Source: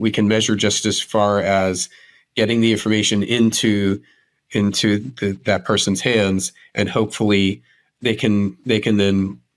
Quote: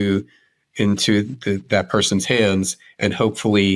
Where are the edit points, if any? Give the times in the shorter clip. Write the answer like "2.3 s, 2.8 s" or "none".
none